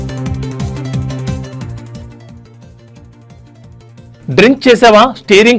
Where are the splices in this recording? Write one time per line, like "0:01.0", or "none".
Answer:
0:03.5